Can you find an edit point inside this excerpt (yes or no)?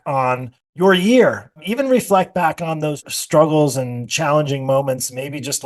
no